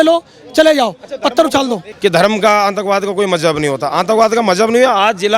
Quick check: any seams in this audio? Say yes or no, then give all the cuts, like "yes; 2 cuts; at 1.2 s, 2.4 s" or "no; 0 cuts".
yes; 1 cut; at 1.9 s